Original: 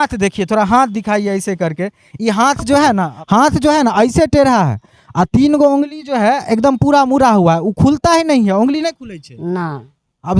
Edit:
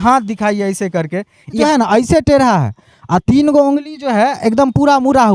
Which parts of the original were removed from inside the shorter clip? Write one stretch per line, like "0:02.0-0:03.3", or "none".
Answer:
0:02.3-0:03.7